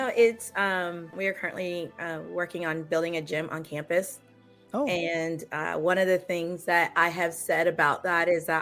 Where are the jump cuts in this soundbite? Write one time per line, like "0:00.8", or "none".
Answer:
0:01.1